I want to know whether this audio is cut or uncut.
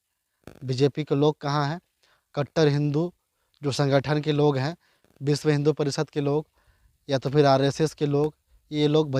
uncut